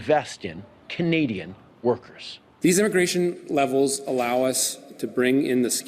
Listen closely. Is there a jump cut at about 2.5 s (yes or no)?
yes